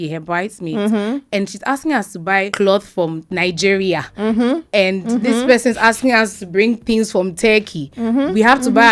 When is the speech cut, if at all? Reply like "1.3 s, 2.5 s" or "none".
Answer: 2.5 s, 3.2 s